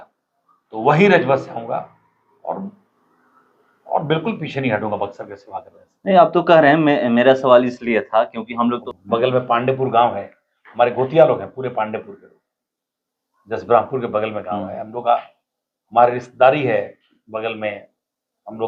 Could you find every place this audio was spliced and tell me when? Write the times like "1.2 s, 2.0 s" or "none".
8.8 s